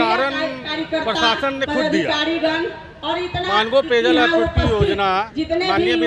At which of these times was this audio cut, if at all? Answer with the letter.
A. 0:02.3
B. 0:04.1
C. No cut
C